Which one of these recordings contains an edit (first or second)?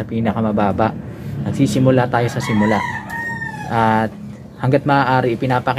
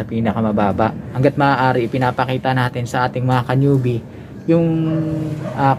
second